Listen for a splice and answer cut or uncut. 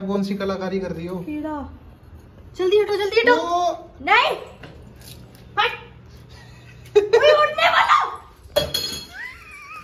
uncut